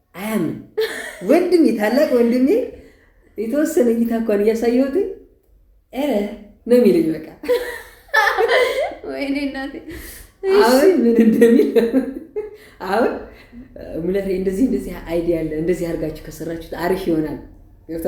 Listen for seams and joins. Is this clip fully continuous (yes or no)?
yes